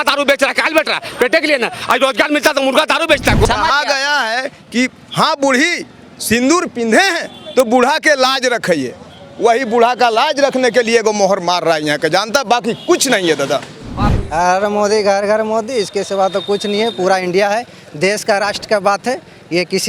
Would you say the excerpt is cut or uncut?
cut